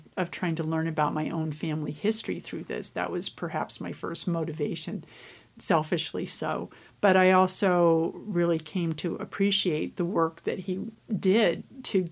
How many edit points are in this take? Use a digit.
1